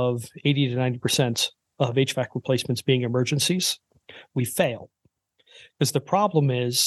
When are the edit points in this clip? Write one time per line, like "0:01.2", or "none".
none